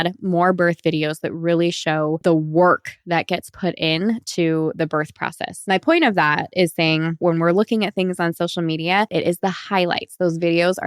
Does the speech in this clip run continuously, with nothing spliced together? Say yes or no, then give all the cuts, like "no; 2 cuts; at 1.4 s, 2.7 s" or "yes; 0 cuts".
no; 4 cuts; at 2.2 s, 5.5 s, 7.2 s, 9.1 s